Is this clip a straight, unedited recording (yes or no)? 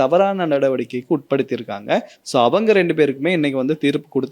yes